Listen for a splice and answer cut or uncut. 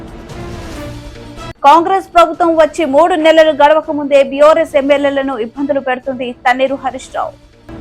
cut